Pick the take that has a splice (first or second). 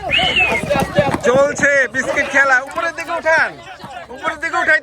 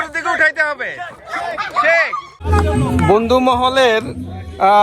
second